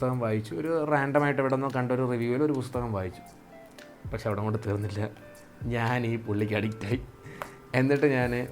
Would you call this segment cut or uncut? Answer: uncut